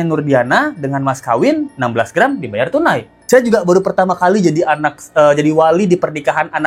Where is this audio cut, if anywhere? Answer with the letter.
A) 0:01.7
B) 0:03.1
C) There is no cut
B